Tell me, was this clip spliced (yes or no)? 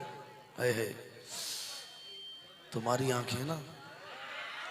no